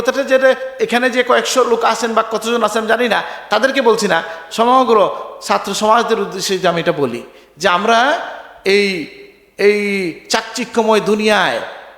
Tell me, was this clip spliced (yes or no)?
no